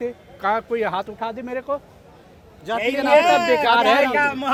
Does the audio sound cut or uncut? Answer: uncut